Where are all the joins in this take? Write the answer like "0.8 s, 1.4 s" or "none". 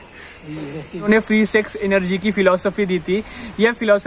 1.0 s

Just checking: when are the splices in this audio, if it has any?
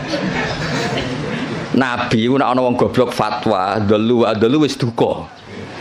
none

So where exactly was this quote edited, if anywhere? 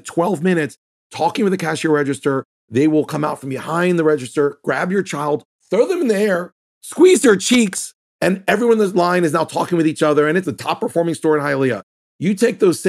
8.0 s, 10.4 s

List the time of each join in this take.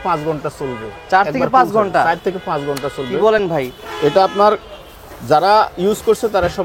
none

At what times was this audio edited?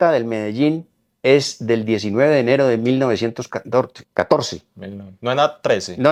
none

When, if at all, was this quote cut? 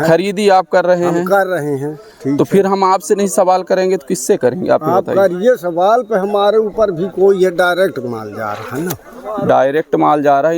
none

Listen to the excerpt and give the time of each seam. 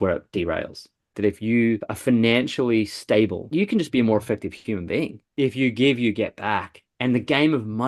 1.1 s, 1.9 s, 3.4 s, 5.2 s

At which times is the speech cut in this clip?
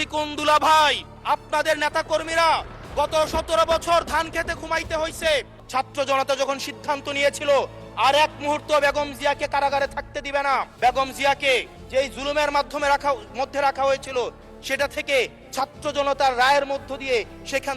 1.1 s, 5.6 s, 10.7 s, 11.8 s

